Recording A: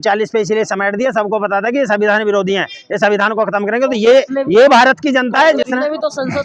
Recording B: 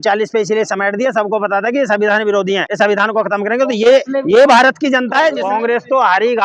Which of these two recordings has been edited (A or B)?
B